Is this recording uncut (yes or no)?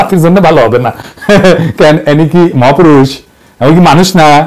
yes